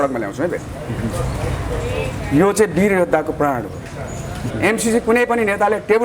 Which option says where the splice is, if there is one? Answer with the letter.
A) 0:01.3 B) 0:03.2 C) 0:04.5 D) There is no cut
C